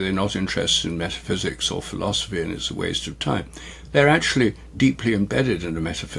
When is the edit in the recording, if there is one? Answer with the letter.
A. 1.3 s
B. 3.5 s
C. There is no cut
C